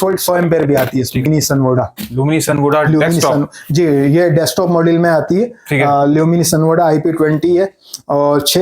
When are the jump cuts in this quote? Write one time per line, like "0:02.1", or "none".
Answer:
0:01.3